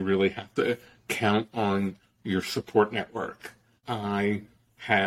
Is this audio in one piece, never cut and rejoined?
no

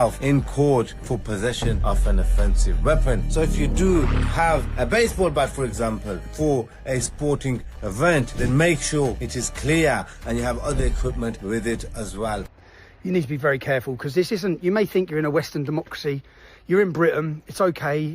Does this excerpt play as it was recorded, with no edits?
no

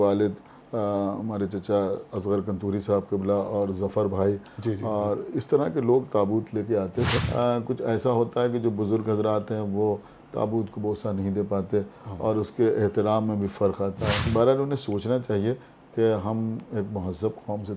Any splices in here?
yes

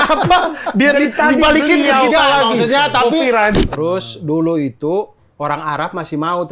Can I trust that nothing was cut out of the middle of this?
no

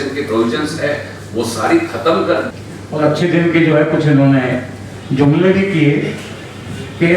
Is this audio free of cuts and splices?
no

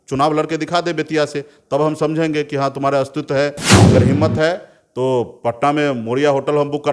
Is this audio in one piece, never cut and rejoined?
no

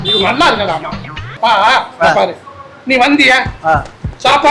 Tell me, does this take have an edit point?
yes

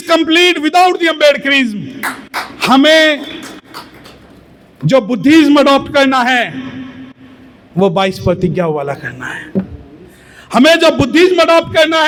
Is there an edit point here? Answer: no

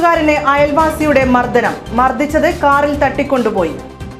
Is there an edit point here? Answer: no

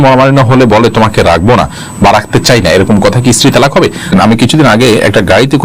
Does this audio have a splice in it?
yes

